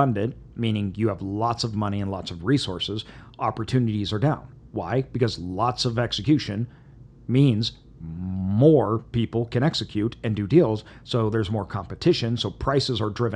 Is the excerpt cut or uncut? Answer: uncut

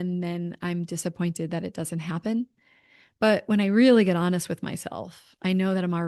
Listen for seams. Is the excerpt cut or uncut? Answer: uncut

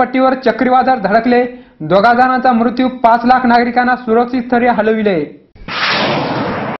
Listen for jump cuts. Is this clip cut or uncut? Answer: uncut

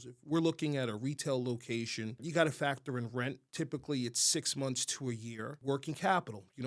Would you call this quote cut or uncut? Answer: cut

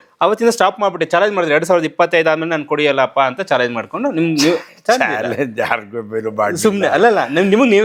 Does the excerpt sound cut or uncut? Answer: uncut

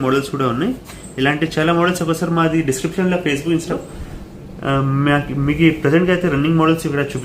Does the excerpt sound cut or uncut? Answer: cut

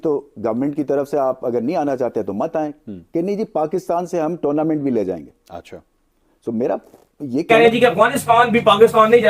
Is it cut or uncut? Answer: cut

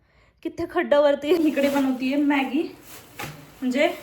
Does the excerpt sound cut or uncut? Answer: cut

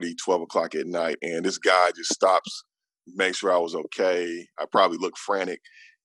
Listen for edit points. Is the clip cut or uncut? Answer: uncut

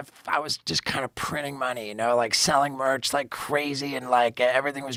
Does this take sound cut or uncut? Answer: uncut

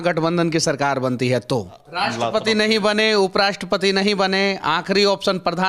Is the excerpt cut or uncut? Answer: cut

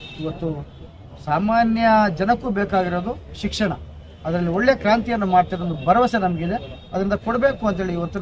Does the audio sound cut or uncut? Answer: uncut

